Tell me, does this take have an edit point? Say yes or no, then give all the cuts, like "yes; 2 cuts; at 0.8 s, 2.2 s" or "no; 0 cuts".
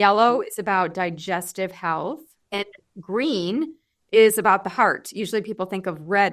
yes; 1 cut; at 2.5 s